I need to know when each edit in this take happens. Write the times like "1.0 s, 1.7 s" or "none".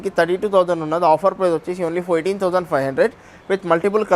none

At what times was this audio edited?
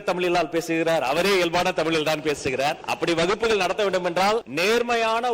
2.9 s, 4.5 s

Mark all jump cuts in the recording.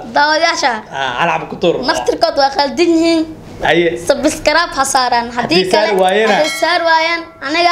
none

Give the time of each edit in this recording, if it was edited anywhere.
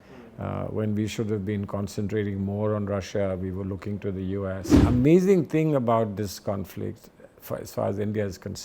4.7 s

